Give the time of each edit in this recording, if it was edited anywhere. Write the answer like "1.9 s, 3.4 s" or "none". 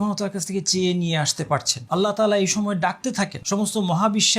1.8 s, 3.4 s